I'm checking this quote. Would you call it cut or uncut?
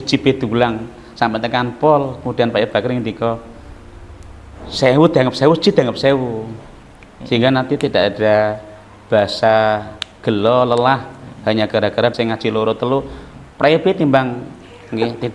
cut